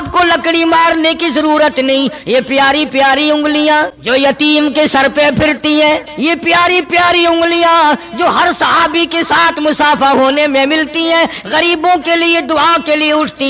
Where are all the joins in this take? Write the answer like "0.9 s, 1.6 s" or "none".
4.0 s, 6.1 s